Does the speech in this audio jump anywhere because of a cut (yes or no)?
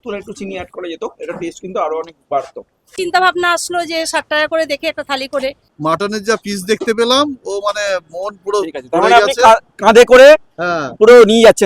yes